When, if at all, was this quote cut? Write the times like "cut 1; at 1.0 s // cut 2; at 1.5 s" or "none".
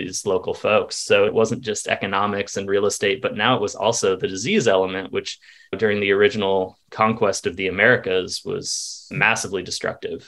cut 1; at 1.3 s // cut 2; at 9.1 s